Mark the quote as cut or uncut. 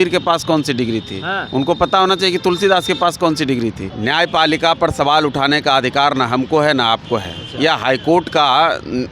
cut